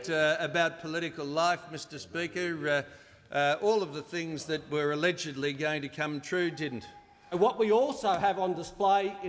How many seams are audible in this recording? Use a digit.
1